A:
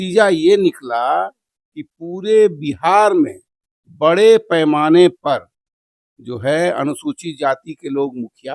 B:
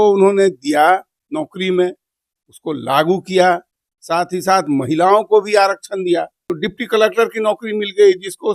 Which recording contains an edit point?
B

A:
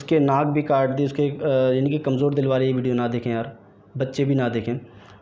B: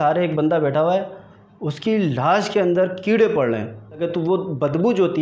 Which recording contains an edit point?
B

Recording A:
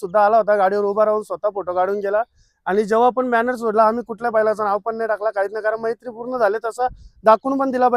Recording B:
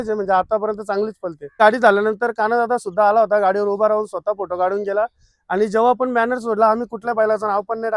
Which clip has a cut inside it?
B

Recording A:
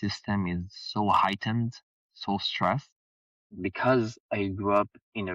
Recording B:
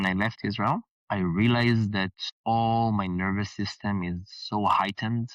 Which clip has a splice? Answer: B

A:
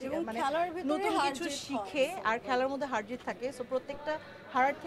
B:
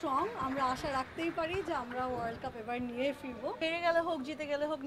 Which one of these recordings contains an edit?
B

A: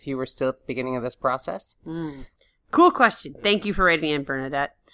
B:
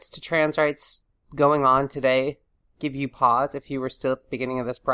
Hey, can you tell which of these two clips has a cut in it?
A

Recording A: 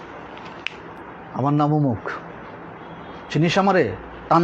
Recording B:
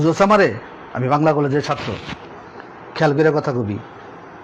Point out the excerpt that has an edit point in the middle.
A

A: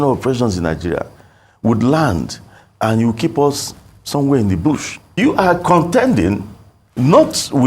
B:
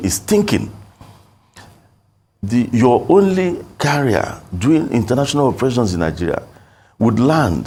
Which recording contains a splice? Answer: A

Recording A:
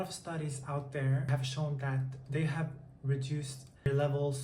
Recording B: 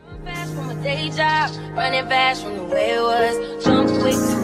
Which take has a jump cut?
A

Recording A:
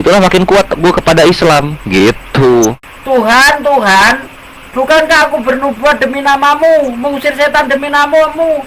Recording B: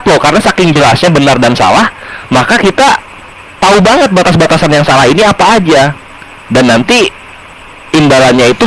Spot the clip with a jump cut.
A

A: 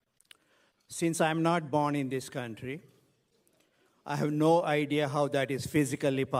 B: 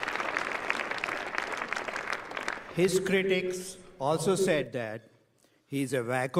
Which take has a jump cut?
A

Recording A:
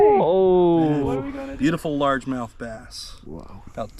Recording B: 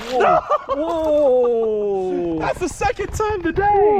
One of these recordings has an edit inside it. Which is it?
A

